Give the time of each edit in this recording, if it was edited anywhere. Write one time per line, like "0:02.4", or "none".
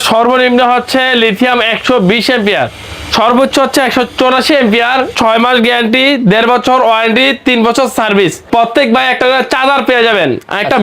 0:05.1
0:08.4